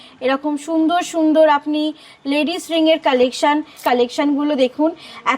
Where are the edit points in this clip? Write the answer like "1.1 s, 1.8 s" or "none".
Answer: 3.8 s